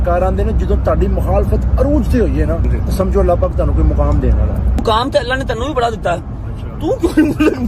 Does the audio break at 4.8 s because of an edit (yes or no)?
yes